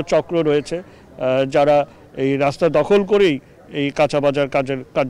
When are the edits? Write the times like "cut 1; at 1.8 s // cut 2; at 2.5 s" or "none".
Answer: none